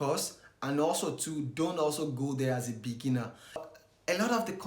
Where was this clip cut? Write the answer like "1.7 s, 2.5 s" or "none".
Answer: 3.7 s